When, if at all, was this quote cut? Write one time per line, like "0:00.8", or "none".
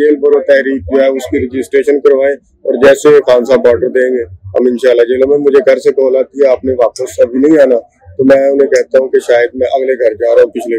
none